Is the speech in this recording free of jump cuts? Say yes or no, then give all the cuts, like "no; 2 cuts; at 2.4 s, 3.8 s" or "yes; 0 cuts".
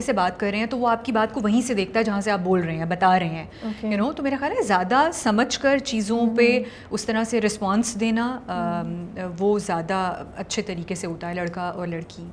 yes; 0 cuts